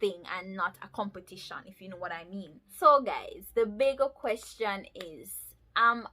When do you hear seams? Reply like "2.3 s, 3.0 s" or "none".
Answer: 2.6 s